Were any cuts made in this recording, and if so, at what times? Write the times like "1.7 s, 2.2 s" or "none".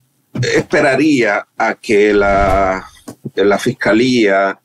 none